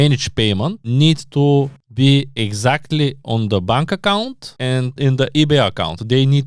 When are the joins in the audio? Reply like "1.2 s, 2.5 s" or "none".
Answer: none